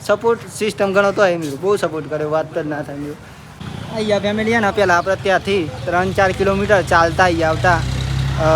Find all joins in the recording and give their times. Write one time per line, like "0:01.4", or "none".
0:03.6